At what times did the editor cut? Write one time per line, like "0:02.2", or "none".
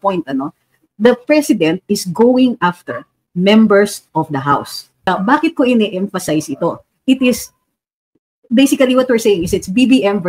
0:04.9